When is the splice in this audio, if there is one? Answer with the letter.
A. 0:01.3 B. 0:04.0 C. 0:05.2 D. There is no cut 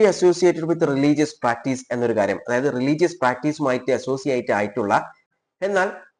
C